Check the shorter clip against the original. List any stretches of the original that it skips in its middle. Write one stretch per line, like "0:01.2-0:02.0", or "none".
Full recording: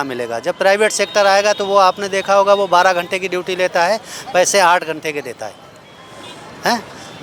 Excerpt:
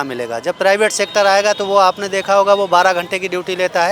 none